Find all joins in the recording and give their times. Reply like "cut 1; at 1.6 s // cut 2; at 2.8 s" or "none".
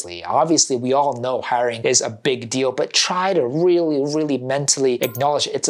none